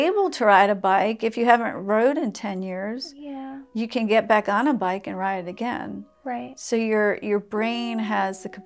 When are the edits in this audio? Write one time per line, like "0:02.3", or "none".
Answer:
none